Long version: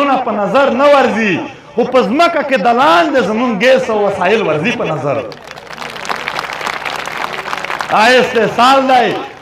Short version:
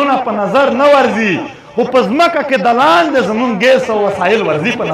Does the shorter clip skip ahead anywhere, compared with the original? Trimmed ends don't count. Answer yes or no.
no